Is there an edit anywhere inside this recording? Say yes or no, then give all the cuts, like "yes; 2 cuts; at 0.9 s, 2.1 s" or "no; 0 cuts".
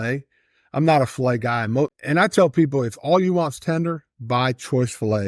yes; 1 cut; at 2.0 s